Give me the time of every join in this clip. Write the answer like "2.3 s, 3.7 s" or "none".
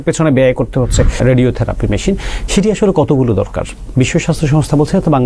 1.2 s